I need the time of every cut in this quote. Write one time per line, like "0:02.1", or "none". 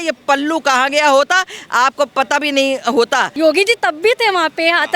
0:03.3